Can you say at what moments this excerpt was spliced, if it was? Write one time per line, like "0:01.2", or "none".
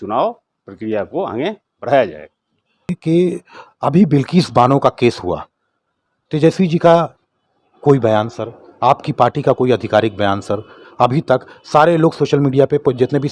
0:03.0

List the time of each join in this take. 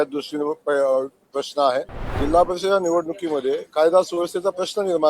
0:02.0

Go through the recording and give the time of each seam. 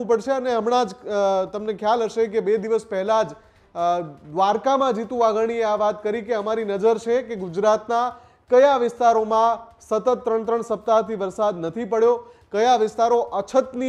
none

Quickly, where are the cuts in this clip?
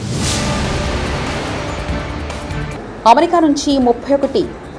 0:02.7

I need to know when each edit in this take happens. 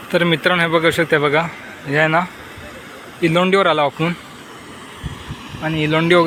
none

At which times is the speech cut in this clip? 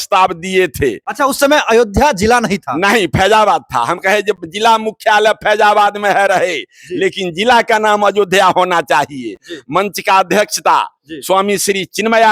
none

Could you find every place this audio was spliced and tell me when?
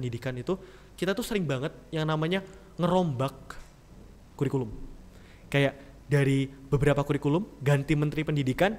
none

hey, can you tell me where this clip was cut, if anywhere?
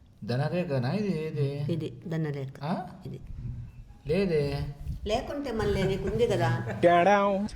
0:06.7

